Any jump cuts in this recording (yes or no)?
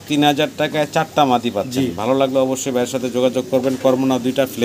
no